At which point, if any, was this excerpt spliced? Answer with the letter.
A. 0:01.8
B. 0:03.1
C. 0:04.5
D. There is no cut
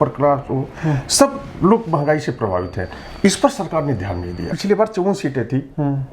C